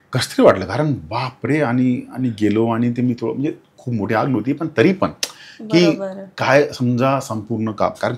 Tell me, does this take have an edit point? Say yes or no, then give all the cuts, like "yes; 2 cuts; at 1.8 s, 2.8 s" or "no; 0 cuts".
no; 0 cuts